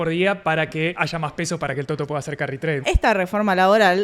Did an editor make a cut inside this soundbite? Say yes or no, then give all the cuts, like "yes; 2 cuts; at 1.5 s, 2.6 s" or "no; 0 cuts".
yes; 2 cuts; at 0.9 s, 2.8 s